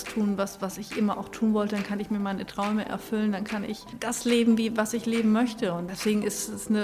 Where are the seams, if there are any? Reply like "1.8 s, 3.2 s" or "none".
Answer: 3.9 s, 5.9 s